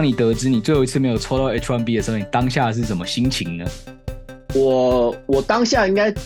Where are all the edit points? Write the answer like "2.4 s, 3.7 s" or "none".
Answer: none